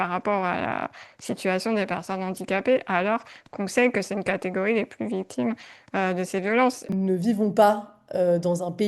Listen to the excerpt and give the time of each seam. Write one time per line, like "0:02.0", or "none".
0:06.8